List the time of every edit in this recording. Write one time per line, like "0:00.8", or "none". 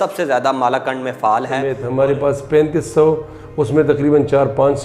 0:01.8